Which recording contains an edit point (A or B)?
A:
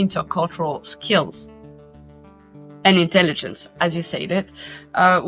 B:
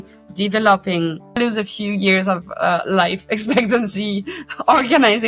B